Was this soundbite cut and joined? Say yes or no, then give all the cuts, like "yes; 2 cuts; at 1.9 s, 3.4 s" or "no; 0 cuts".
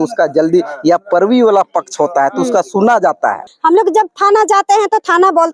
yes; 1 cut; at 3.5 s